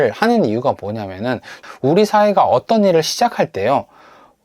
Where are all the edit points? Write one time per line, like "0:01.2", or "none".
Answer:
0:01.6